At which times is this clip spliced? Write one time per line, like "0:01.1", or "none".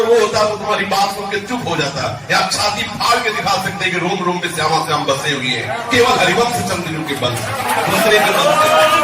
none